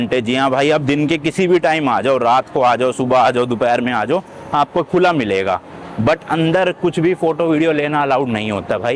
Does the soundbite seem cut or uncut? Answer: uncut